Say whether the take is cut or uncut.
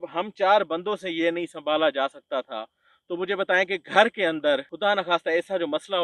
cut